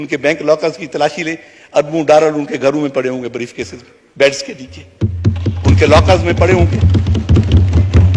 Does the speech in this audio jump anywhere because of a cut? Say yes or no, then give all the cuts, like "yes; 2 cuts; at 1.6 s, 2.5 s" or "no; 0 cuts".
no; 0 cuts